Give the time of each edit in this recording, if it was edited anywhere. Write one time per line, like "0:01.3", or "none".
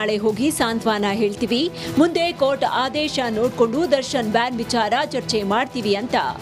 none